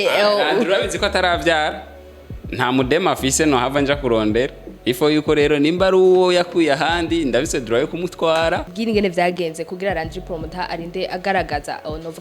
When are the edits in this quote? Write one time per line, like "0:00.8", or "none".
0:08.7

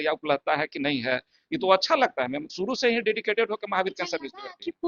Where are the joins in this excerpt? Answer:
none

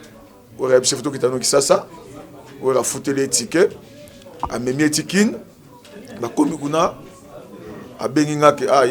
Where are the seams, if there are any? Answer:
none

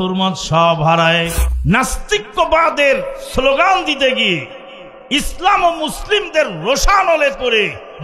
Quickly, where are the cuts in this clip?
0:01.4

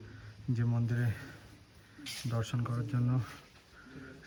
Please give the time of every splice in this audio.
none

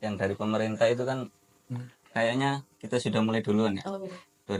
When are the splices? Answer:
none

